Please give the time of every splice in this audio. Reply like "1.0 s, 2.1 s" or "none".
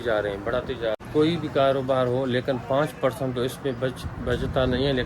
1.0 s